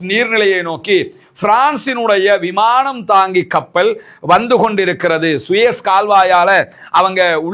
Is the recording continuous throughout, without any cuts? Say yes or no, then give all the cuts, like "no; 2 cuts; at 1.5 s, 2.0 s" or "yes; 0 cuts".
yes; 0 cuts